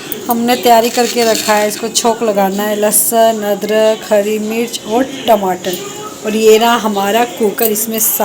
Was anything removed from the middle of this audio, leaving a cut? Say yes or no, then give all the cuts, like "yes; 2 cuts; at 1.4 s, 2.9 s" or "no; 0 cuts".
no; 0 cuts